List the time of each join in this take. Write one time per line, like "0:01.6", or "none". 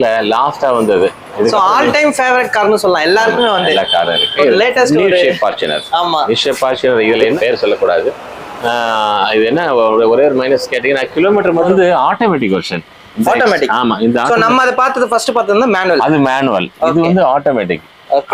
0:04.6
0:07.4
0:11.7